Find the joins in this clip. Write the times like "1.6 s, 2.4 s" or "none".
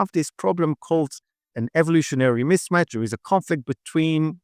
none